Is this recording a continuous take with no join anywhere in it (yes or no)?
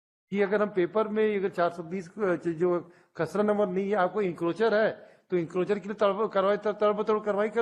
yes